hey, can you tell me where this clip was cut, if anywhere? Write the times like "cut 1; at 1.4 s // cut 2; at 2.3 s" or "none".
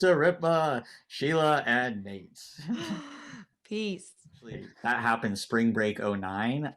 cut 1; at 4.7 s